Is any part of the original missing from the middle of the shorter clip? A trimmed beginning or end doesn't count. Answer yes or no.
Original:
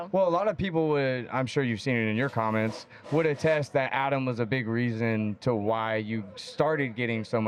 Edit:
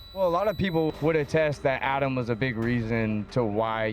yes